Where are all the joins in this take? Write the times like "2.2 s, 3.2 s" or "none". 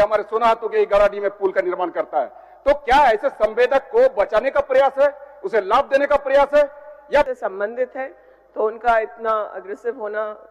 7.3 s